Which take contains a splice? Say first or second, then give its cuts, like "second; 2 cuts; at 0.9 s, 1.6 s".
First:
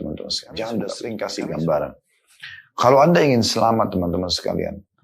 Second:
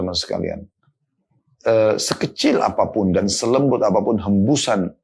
first; 1 cut; at 1.1 s